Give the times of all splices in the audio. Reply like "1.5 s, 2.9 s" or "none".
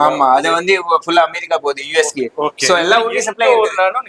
none